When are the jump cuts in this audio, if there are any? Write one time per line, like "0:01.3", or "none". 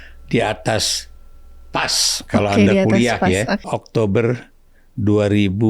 0:03.6